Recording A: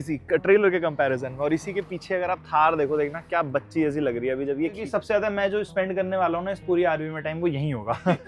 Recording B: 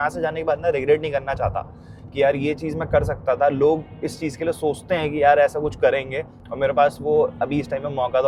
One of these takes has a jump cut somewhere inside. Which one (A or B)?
A